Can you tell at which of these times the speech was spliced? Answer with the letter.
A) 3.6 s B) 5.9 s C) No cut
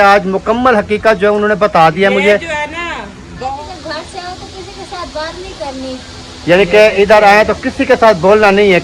A